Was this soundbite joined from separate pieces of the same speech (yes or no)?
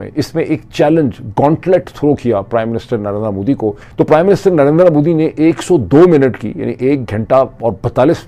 yes